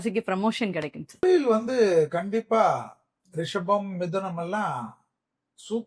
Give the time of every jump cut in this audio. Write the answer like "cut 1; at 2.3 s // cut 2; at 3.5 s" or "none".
cut 1; at 1.2 s